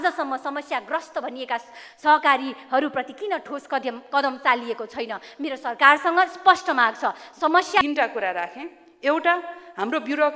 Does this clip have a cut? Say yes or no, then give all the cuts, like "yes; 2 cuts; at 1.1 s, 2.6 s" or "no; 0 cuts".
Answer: yes; 1 cut; at 7.8 s